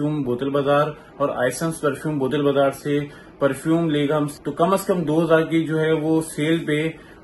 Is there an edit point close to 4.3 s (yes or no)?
yes